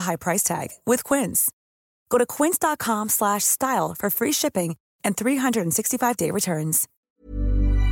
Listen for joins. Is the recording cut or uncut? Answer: cut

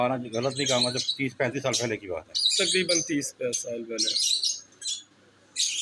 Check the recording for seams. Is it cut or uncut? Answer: uncut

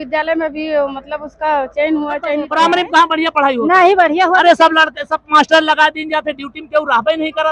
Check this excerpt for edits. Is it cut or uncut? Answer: cut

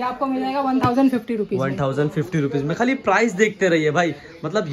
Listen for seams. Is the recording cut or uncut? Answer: uncut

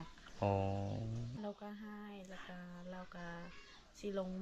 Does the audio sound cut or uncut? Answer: cut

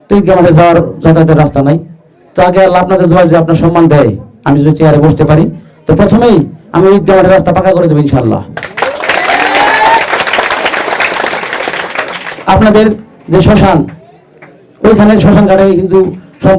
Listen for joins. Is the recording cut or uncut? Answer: uncut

